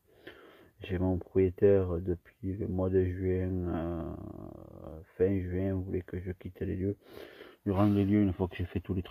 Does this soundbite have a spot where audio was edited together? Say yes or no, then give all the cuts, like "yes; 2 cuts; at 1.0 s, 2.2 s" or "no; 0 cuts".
no; 0 cuts